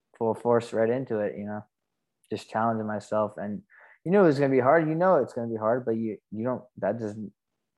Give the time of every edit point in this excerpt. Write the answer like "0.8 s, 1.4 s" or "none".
none